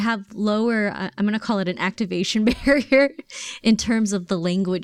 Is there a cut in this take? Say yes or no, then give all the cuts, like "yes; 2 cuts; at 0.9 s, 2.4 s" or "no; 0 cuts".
no; 0 cuts